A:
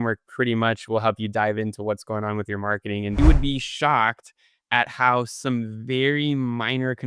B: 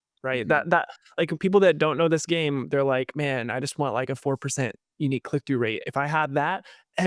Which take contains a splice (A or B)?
A